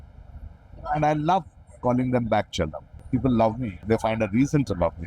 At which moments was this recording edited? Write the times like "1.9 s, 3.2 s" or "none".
3.0 s, 3.8 s